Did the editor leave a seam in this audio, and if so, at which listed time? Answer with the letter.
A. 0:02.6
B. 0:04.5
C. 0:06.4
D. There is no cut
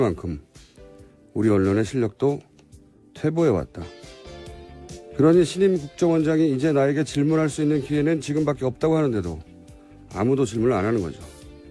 C